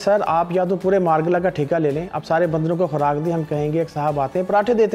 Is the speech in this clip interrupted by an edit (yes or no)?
no